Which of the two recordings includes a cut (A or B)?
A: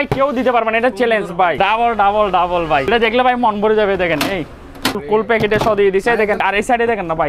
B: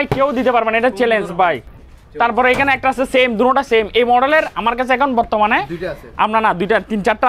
A